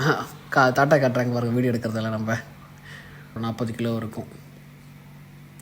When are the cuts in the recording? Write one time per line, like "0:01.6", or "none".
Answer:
0:03.4